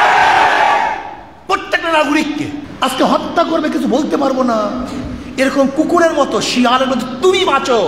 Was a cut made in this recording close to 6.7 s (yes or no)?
no